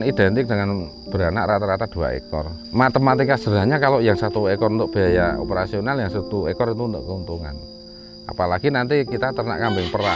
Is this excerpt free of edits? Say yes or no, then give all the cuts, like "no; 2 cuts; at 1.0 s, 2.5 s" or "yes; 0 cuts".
yes; 0 cuts